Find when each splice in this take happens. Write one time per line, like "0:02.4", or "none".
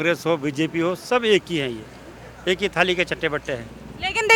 none